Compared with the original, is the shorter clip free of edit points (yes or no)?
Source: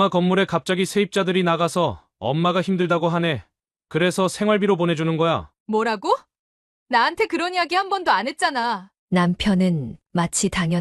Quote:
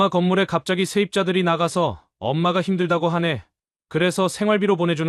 yes